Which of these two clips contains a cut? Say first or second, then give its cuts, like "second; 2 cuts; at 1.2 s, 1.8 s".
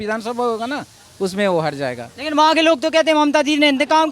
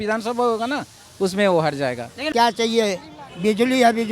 second; 1 cut; at 2.3 s